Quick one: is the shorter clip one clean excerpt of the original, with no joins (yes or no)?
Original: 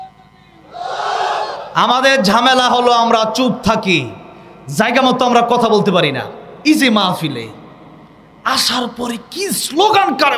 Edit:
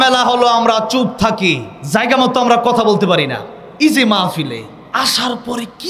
no